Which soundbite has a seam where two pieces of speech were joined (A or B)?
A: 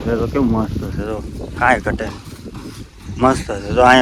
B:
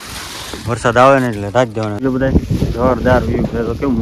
B